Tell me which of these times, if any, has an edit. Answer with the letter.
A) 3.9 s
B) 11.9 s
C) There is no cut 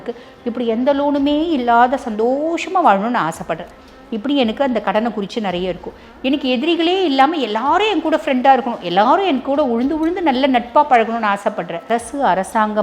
B